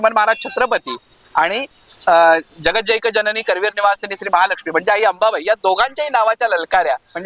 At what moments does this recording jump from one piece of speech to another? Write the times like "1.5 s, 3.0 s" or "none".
none